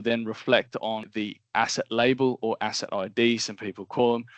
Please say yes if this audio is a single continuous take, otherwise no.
no